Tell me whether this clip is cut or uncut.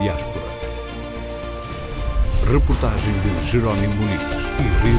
uncut